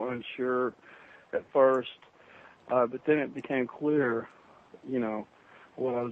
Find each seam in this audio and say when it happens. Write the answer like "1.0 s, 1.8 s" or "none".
2.5 s